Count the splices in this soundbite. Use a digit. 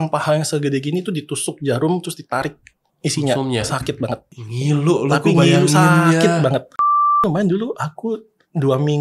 2